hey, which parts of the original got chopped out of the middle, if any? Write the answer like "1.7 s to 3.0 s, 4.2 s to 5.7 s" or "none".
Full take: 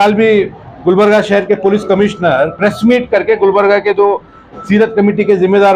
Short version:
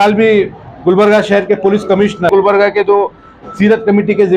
2.3 s to 3.4 s